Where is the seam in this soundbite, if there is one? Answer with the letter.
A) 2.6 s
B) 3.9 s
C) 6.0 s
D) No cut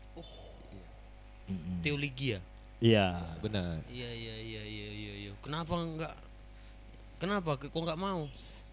D